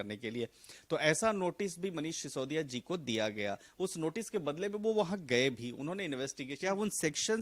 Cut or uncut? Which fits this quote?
cut